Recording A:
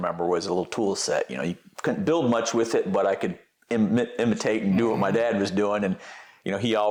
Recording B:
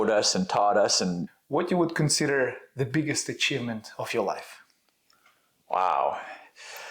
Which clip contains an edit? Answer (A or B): B